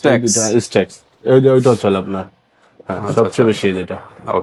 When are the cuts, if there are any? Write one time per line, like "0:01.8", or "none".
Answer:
none